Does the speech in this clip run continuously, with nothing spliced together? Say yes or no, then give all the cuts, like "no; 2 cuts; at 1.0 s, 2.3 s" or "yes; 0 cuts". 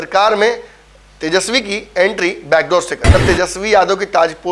no; 1 cut; at 3.0 s